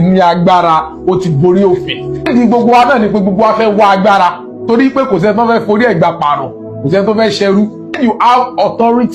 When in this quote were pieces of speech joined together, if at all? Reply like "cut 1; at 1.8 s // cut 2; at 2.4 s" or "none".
cut 1; at 2.3 s // cut 2; at 7.9 s